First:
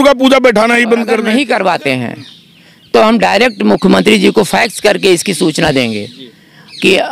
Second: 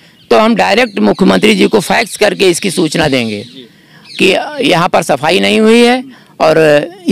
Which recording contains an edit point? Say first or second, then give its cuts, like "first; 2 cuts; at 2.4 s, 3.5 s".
first; 1 cut; at 1.2 s